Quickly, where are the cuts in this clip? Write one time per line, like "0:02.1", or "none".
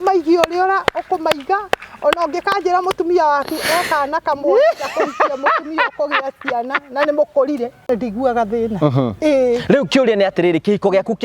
0:07.9

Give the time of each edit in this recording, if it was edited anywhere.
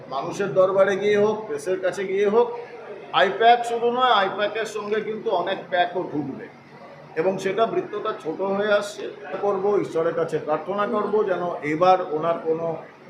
0:02.7
0:09.4

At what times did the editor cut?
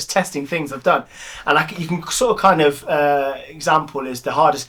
none

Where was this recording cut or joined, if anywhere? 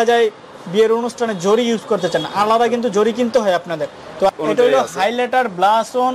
0:04.3

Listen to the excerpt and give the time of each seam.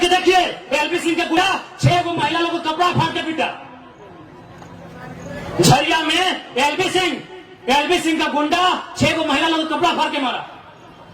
0:01.4

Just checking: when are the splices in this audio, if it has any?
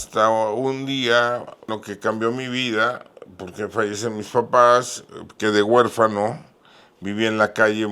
0:01.8

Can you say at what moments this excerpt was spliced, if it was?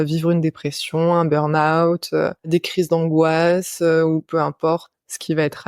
0:02.5

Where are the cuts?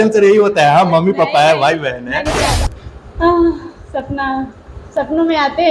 0:02.5

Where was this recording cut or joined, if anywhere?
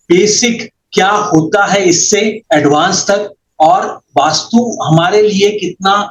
none

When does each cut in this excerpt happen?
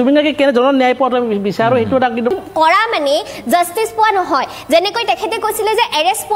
0:02.3

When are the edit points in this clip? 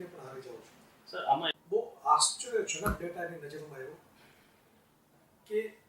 0:01.5

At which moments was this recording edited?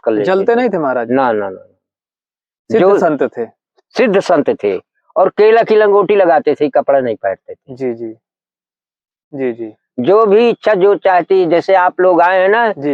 0:09.2

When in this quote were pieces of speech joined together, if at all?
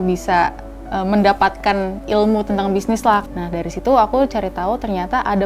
0:03.2

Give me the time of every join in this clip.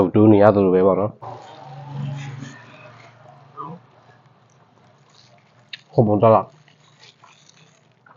0:01.2

